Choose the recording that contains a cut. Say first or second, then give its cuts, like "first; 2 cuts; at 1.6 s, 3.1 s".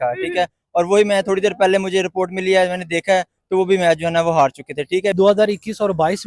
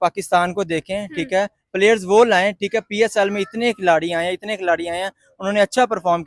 first; 1 cut; at 5.1 s